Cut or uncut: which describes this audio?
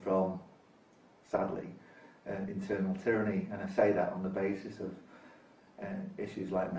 uncut